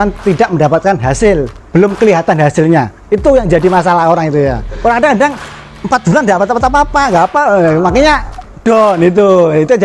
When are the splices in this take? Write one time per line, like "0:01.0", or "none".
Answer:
0:04.7